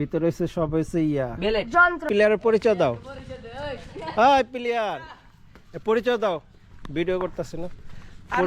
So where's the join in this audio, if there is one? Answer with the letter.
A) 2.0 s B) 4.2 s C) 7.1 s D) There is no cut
A